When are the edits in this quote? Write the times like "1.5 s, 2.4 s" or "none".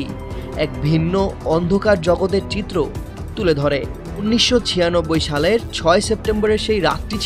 4.2 s